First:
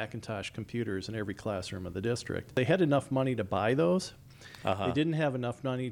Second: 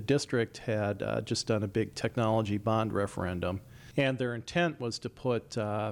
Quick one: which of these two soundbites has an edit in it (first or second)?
first